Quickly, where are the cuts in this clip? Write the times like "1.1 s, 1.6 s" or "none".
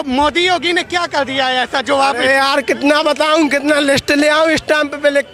none

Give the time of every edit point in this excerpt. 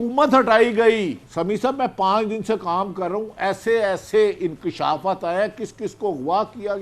1.2 s

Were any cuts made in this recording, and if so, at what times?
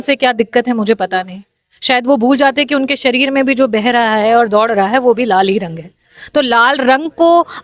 none

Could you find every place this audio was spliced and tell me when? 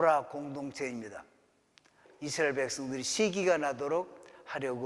1.9 s

